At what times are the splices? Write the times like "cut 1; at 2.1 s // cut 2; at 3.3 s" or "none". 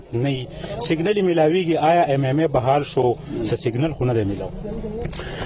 none